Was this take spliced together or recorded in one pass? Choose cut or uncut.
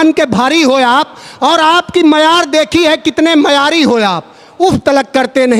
uncut